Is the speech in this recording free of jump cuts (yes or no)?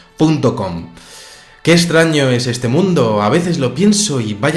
yes